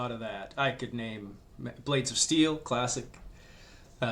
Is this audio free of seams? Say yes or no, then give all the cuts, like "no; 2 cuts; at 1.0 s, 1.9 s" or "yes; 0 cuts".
yes; 0 cuts